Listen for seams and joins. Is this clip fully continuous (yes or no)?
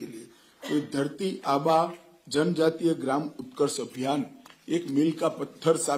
yes